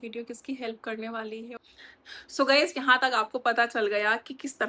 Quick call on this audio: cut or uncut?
cut